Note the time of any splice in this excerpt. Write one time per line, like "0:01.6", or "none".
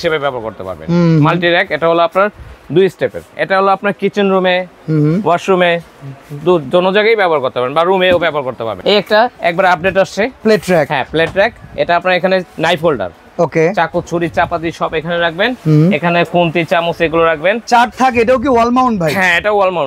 0:03.3
0:08.7
0:10.3
0:17.6